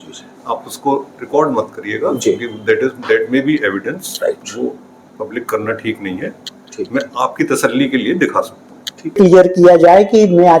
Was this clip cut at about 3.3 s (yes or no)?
no